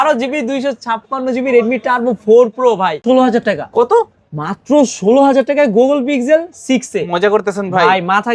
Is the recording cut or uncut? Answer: cut